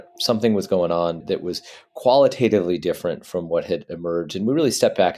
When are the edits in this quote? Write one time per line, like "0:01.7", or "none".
0:01.2